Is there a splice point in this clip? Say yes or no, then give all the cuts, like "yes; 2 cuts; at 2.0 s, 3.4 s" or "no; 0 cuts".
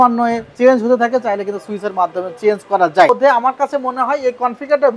yes; 1 cut; at 3.1 s